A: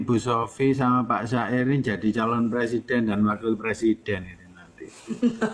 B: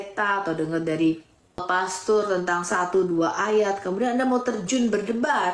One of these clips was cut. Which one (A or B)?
B